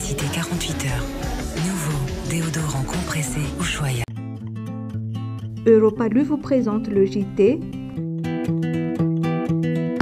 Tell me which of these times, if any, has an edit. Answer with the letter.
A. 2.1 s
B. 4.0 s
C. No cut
B